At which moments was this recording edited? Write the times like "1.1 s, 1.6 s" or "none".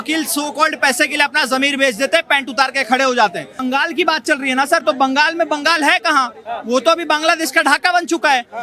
3.6 s